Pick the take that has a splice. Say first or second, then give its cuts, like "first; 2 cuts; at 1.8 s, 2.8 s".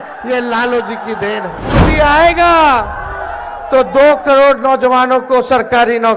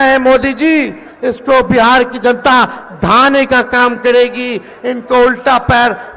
first; 1 cut; at 1.9 s